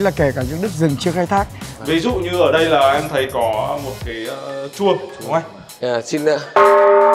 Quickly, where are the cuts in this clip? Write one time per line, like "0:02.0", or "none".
0:01.7
0:05.6

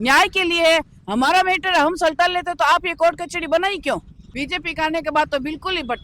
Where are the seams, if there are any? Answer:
0:04.2

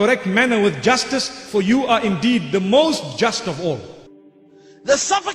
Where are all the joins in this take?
0:04.2

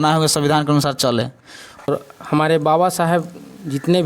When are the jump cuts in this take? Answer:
0:01.8

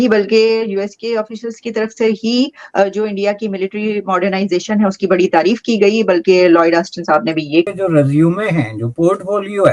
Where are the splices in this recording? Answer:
0:07.7

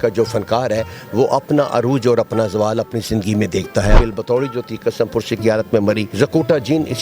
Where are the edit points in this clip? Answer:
0:04.0
0:06.1

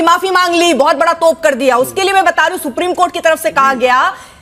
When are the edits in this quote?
none

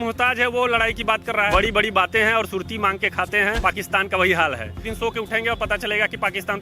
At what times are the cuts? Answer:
0:01.5
0:03.6
0:04.9

